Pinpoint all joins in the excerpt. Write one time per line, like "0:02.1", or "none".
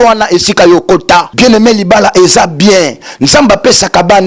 0:01.3